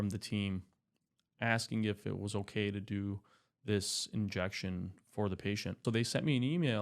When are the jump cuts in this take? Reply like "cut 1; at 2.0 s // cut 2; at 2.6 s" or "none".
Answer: cut 1; at 5.8 s